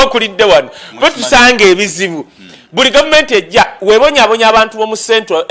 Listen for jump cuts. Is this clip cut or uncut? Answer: uncut